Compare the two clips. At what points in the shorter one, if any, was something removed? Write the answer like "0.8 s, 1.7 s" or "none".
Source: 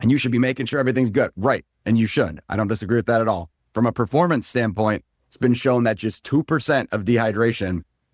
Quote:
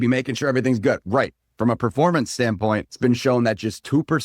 1.4 s, 2.9 s